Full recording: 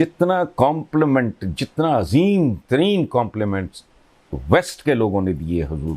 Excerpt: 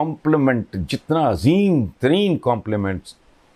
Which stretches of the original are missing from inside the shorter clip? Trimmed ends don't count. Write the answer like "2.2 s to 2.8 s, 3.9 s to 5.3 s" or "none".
none